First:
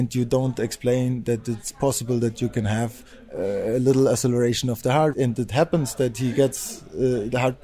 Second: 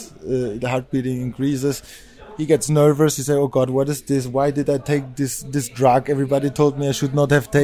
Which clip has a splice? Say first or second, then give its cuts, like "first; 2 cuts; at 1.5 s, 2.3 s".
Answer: first; 1 cut; at 5.1 s